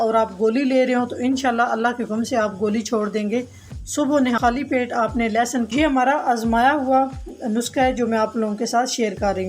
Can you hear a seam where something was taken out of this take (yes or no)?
yes